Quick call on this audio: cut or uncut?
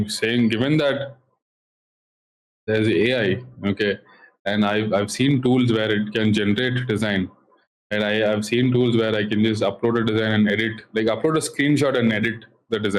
uncut